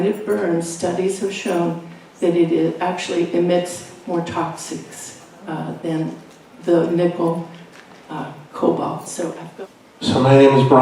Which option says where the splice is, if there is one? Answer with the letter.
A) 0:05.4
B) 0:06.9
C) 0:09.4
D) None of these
C